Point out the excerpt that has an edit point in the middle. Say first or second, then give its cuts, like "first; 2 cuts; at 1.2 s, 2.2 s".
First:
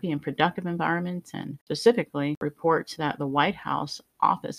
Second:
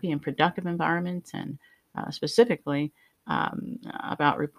first; 2 cuts; at 1.6 s, 2.4 s